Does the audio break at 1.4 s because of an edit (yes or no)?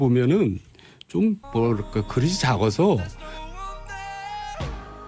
no